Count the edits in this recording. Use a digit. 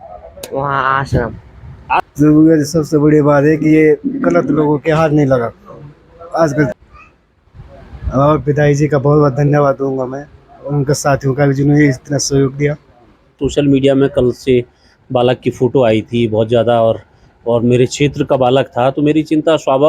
3